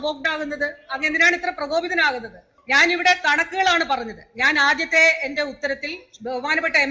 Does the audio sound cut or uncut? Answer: uncut